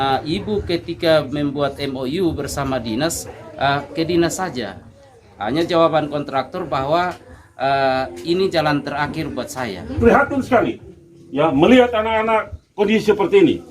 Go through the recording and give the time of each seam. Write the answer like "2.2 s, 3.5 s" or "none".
10.0 s